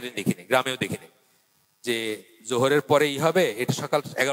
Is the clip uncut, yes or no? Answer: yes